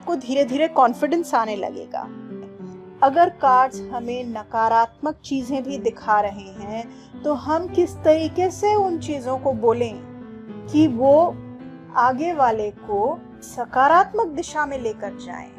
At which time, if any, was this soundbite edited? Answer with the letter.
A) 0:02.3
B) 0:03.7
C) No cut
A